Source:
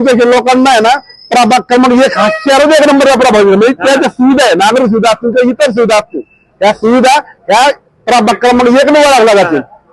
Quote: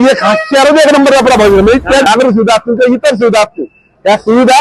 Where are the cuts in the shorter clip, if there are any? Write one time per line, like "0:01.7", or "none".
0:02.1